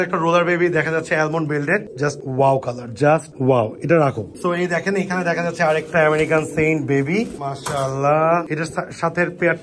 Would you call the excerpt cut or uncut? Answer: uncut